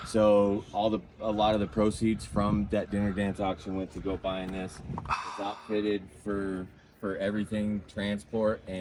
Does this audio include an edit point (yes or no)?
no